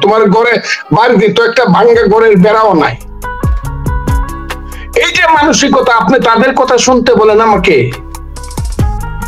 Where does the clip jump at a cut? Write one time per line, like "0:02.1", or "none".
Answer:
0:03.6
0:04.9